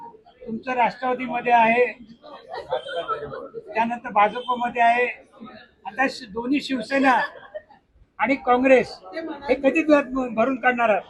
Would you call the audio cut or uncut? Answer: uncut